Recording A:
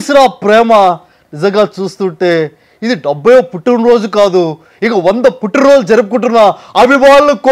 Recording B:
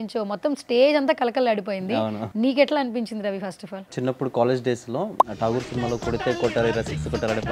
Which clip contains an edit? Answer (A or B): B